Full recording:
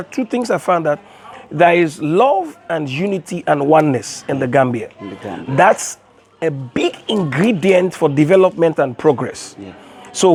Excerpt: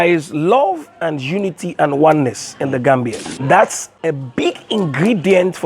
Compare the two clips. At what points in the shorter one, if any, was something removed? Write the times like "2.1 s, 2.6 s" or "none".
3.3 s, 3.9 s